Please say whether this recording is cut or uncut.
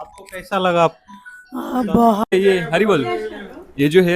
cut